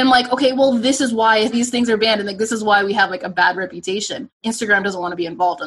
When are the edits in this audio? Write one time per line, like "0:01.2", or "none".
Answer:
0:01.5
0:04.4